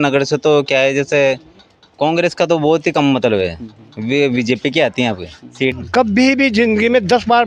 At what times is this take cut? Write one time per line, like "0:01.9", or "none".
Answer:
0:05.8